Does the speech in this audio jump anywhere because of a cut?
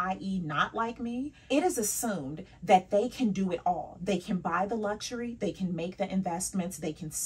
yes; 1 cut; at 1.4 s

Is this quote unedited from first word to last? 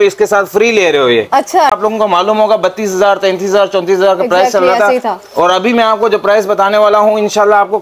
no; 1 cut; at 1.8 s

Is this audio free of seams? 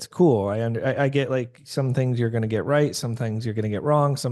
yes; 0 cuts

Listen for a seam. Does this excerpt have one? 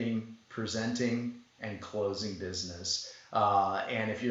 no; 0 cuts

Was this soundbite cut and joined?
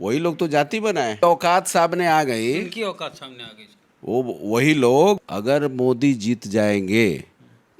yes; 2 cuts; at 1.2 s, 5.2 s

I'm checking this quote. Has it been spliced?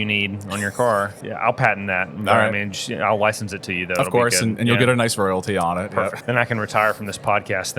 yes; 2 cuts; at 1.2 s, 6.2 s

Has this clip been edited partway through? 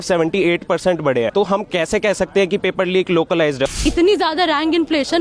yes; 2 cuts; at 1.3 s, 3.8 s

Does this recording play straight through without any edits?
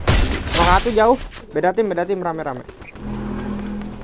no; 1 cut; at 2.9 s

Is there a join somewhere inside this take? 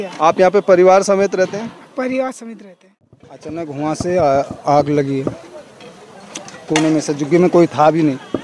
yes; 1 cut; at 3.2 s

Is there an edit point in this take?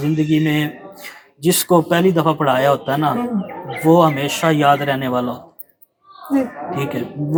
no; 0 cuts

